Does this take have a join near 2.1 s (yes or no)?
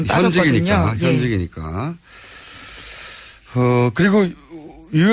yes